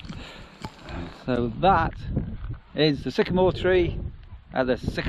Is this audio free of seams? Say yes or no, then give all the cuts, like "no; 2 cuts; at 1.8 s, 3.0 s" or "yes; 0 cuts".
yes; 0 cuts